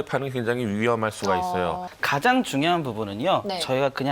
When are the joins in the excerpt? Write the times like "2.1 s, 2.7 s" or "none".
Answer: 1.8 s